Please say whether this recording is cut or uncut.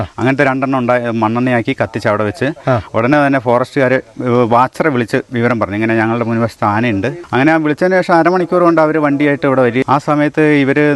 cut